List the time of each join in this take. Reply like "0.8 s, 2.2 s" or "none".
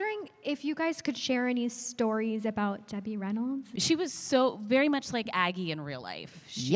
3.7 s